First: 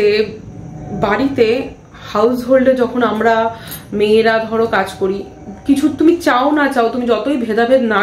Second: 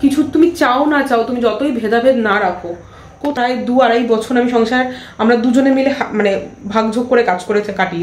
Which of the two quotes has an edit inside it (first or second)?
second